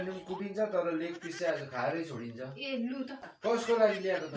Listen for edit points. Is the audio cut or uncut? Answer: cut